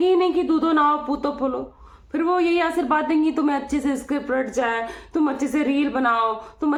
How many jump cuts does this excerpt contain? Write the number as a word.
zero